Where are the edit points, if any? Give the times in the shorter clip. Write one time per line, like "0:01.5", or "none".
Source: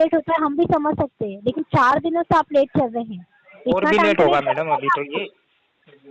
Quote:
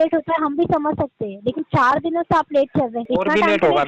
0:03.0